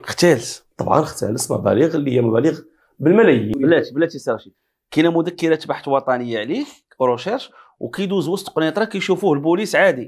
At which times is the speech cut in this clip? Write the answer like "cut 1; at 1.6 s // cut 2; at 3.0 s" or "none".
cut 1; at 3.6 s